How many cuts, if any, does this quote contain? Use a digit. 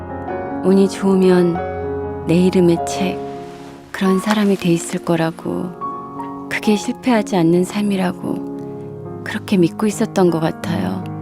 2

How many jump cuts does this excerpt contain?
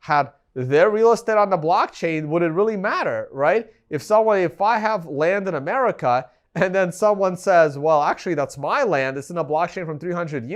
0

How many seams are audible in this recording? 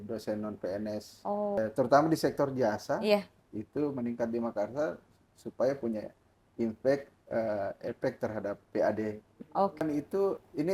2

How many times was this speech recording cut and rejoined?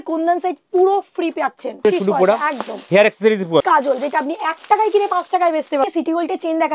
3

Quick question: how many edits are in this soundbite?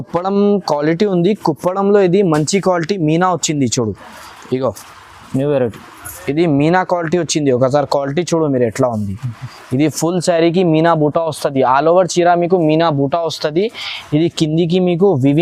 0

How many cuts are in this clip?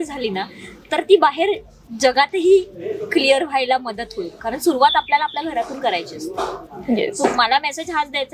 0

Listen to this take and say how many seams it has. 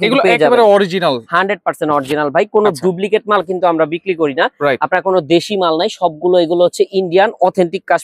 0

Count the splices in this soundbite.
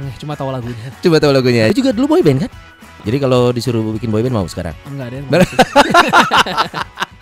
2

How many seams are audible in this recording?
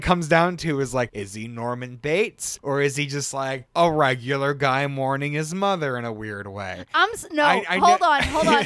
2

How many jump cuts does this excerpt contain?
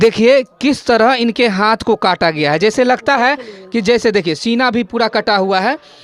0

